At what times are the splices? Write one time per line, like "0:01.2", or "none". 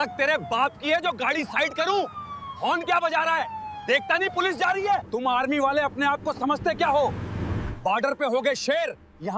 0:05.1